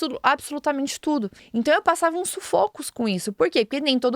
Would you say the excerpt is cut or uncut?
cut